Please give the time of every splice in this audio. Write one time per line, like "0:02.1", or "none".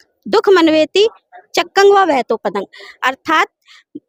none